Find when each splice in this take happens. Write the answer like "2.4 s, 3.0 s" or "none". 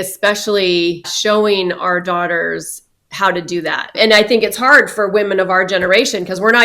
1.1 s, 3.9 s